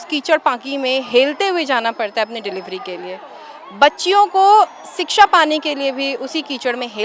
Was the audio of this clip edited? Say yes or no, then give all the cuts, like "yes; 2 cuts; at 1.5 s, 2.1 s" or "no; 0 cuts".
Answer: no; 0 cuts